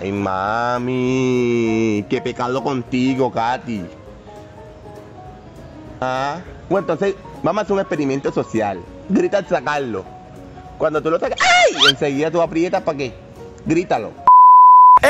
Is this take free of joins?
no; 1 cut; at 14.2 s

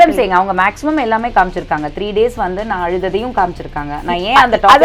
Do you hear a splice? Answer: no; 0 cuts

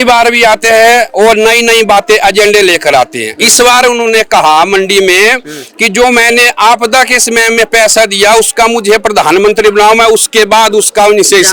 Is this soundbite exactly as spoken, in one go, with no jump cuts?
yes; 0 cuts

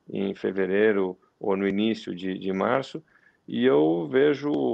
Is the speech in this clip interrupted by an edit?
no; 0 cuts

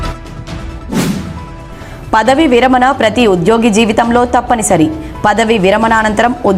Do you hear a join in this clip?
yes; 1 cut; at 1.1 s

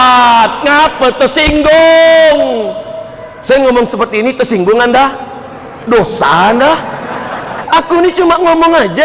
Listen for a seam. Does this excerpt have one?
yes; 1 cut; at 7.5 s

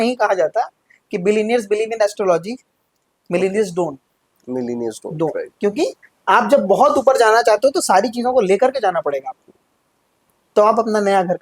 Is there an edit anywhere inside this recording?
no; 0 cuts

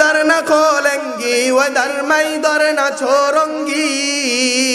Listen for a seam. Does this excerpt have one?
no; 0 cuts

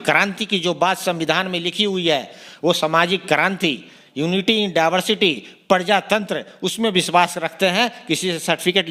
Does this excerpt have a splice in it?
no; 0 cuts

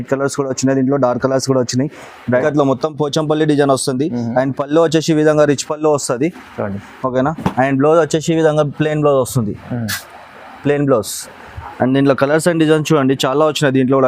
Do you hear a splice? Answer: yes; 1 cut; at 2.4 s

